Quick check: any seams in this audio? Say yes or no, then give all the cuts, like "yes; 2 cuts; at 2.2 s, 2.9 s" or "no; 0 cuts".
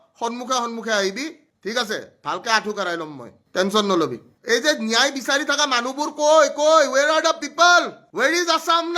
yes; 1 cut; at 4.3 s